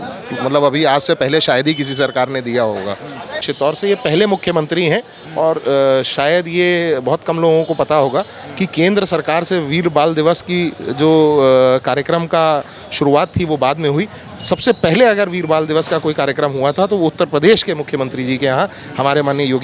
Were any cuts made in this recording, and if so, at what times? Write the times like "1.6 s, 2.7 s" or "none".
3.3 s